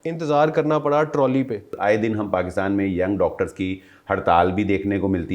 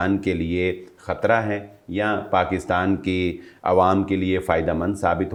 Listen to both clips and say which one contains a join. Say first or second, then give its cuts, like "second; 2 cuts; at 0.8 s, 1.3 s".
first; 1 cut; at 1.7 s